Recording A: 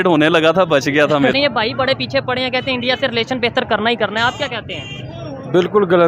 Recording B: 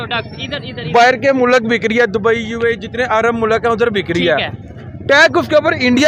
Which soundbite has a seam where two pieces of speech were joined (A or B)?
A